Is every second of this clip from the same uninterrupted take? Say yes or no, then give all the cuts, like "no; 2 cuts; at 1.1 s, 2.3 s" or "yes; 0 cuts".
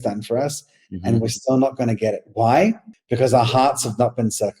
no; 1 cut; at 2.9 s